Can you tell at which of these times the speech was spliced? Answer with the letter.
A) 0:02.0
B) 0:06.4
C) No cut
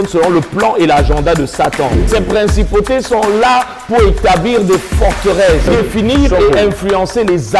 A